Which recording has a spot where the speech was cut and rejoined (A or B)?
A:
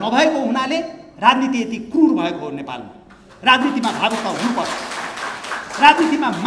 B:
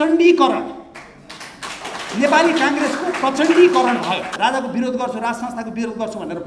B